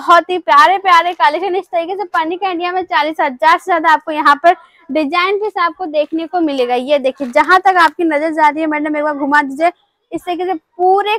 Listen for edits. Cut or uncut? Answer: uncut